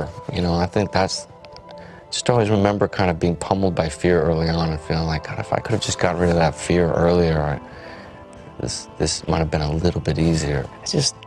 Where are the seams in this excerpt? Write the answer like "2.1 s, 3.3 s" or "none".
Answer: none